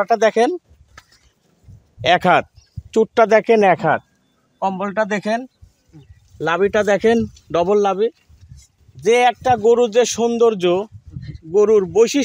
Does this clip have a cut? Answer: no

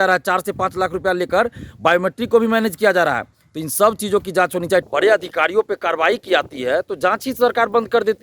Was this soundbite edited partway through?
yes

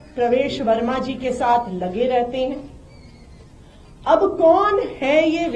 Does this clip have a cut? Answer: no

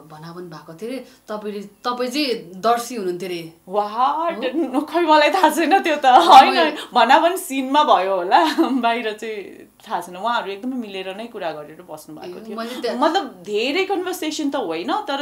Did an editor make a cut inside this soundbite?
no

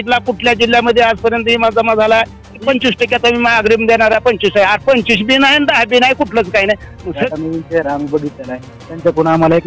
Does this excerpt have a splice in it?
yes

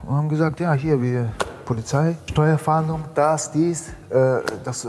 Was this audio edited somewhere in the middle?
yes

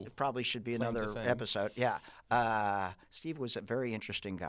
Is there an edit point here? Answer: no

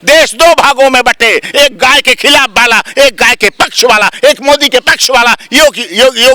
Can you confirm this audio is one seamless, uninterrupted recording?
yes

